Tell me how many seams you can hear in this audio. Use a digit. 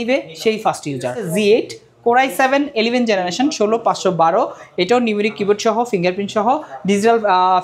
1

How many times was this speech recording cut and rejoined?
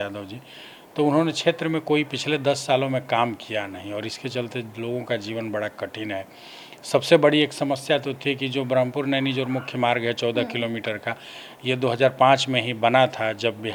0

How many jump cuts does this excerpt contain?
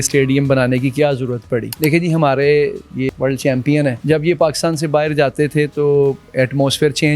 3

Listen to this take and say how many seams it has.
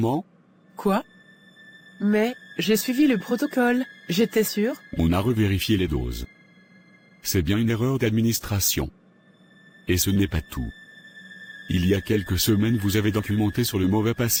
0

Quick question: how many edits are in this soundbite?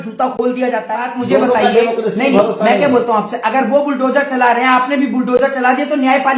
1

